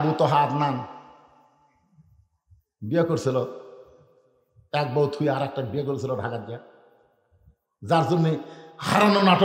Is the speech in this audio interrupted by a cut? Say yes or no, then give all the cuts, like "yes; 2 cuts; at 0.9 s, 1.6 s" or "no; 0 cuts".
no; 0 cuts